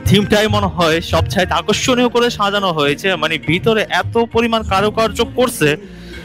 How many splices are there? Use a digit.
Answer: 0